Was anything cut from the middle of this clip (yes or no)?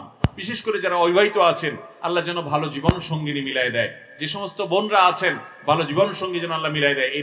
no